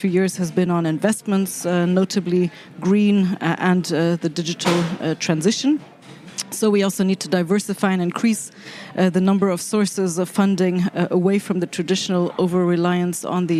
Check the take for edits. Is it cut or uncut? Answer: uncut